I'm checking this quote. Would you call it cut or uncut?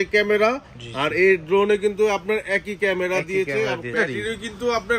cut